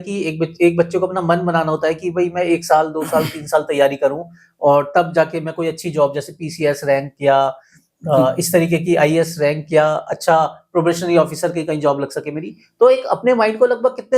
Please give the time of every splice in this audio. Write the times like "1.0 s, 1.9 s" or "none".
none